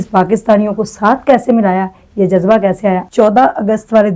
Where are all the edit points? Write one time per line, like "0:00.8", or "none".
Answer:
0:03.1